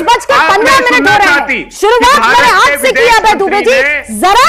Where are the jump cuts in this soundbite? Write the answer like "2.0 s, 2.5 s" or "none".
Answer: none

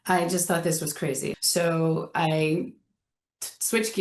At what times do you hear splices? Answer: 1.3 s

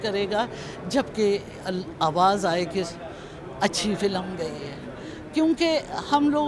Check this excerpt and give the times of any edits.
none

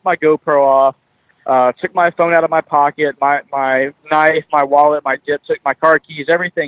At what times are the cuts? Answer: none

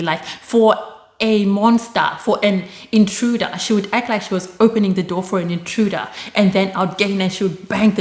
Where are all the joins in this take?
none

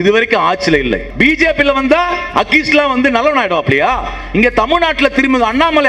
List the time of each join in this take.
1.1 s

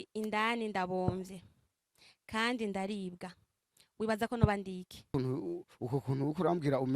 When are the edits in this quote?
5.1 s

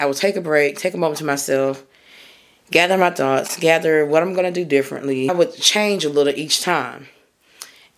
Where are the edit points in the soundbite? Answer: 5.3 s

